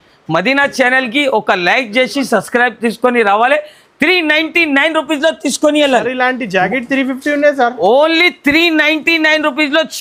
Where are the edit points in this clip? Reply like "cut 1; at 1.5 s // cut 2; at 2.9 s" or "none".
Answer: none